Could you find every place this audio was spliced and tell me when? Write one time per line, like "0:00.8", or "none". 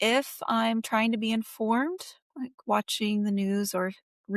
none

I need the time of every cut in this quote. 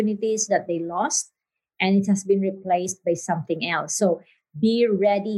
none

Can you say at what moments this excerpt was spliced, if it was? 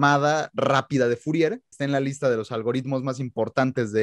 0:01.7

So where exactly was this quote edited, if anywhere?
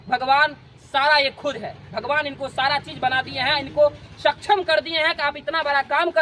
none

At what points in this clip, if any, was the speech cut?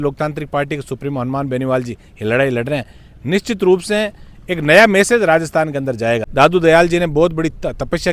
0:06.3

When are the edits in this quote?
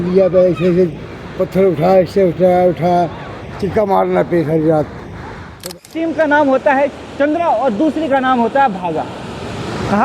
0:05.7

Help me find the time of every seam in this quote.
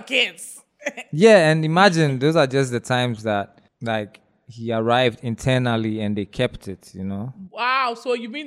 0:03.6
0:07.4

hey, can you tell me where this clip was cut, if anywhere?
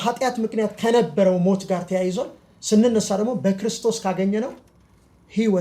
none

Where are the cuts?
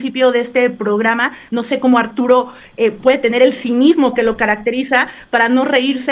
none

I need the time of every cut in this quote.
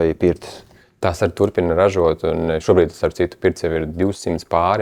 none

